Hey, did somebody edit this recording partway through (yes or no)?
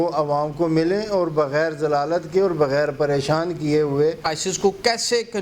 yes